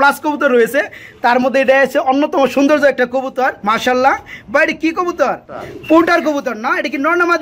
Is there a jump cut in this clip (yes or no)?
no